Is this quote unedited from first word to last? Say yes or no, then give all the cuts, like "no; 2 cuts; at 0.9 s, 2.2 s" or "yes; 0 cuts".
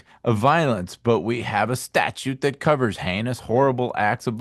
yes; 0 cuts